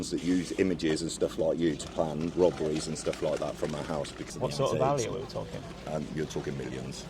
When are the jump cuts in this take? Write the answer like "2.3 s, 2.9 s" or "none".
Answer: 4.2 s